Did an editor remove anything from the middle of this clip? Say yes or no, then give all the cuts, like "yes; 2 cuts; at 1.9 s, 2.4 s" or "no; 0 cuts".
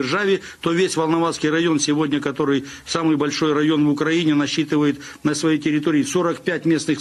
no; 0 cuts